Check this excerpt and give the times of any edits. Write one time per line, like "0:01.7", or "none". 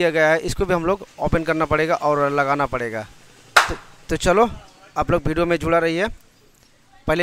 none